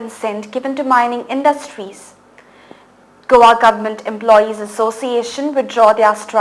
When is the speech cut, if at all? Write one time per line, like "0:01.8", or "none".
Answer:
0:01.2